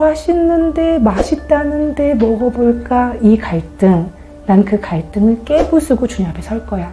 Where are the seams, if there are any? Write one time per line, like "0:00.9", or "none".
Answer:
none